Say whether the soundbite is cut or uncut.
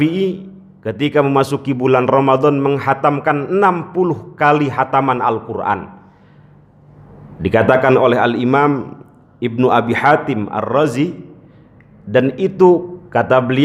uncut